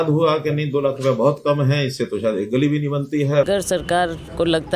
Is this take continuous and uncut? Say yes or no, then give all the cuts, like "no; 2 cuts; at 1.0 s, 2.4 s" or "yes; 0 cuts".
no; 1 cut; at 3.5 s